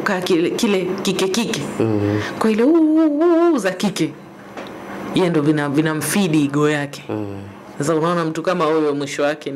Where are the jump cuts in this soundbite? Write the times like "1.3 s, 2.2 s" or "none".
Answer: none